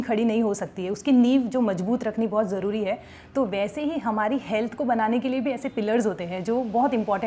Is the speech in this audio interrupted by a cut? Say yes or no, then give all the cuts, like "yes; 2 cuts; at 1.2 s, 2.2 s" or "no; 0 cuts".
no; 0 cuts